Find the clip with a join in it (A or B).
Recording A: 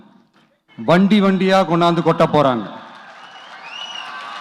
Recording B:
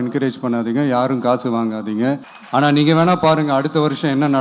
B